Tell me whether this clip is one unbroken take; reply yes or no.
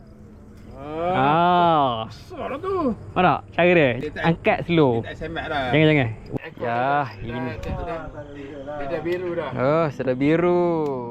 no